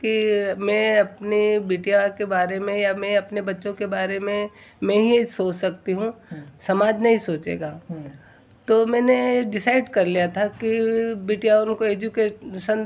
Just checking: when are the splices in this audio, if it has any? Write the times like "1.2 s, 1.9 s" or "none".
none